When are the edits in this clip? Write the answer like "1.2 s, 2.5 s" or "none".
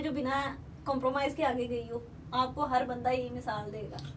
none